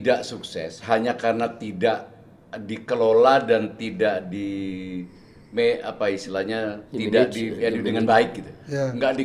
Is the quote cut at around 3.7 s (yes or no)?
no